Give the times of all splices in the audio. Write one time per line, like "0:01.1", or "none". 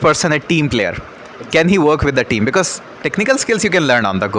none